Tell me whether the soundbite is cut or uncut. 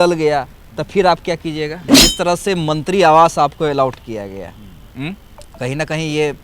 cut